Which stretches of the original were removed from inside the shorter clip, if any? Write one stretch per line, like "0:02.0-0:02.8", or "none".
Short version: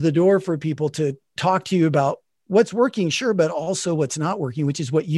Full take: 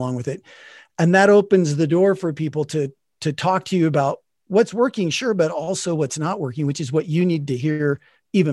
0:03.0-0:03.3